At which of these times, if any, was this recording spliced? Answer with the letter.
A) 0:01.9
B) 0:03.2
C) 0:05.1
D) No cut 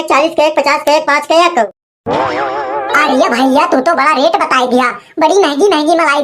A